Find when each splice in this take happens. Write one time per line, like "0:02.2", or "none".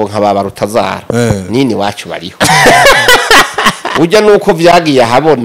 none

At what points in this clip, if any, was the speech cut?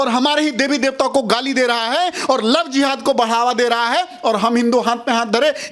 none

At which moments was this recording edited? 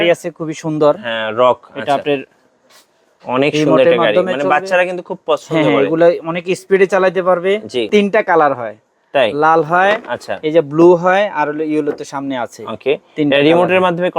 0:07.9

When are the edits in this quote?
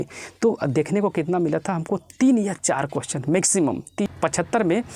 0:04.1

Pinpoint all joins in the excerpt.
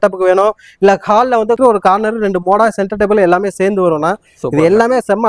0:01.6

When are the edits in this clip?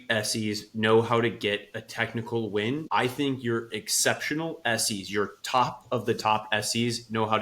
0:02.8

